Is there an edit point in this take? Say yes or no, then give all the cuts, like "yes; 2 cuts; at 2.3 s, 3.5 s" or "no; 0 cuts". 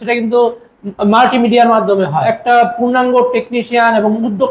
yes; 1 cut; at 2.2 s